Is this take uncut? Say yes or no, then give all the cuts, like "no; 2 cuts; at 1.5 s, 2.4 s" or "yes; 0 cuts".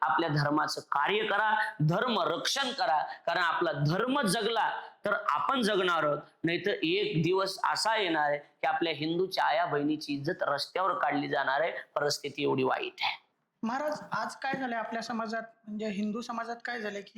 yes; 0 cuts